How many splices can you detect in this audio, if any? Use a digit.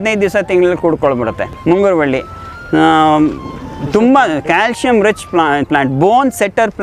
0